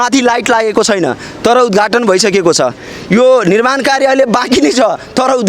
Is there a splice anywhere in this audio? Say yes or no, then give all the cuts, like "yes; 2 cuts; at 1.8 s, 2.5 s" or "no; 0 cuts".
no; 0 cuts